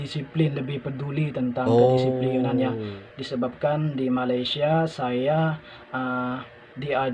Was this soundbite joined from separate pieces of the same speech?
no; 0 cuts

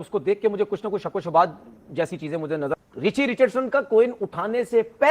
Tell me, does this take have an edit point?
yes; 1 cut; at 2.7 s

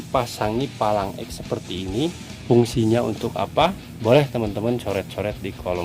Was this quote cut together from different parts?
yes; 1 cut; at 3.5 s

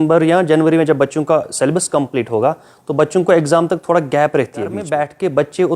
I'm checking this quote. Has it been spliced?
yes; 1 cut; at 4.9 s

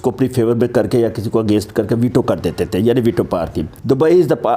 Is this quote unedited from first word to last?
no; 1 cut; at 3.7 s

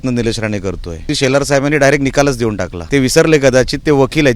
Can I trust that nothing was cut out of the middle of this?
no; 2 cuts; at 1.1 s, 2.7 s

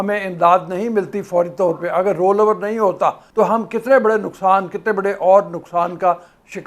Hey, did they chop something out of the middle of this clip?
yes; 1 cut; at 3.2 s

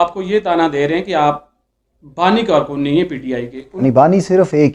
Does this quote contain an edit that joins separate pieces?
yes; 1 cut; at 3.7 s

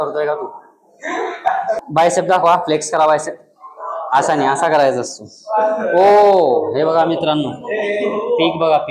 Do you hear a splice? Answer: yes; 1 cut; at 1.8 s

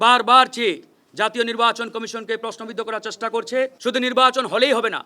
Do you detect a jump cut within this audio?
yes; 1 cut; at 3.8 s

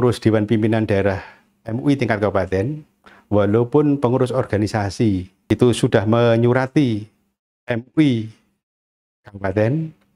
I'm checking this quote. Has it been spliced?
yes; 1 cut; at 5.3 s

